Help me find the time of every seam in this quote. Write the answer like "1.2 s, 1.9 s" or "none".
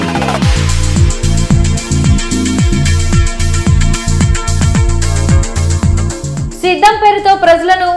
6.3 s

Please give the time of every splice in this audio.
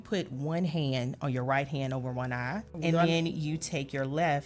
2.7 s

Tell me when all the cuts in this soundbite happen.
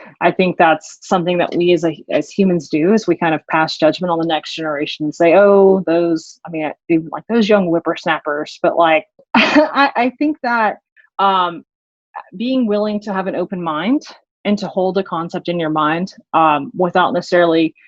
9.2 s

